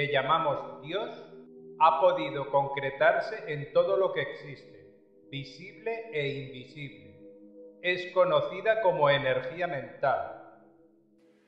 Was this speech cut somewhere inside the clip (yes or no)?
no